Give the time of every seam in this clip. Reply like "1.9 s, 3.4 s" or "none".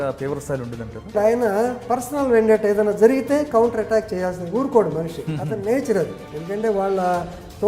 1.1 s, 6.2 s

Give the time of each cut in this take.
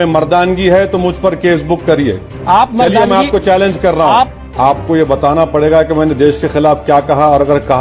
4.4 s

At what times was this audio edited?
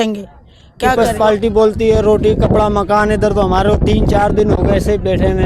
1.1 s

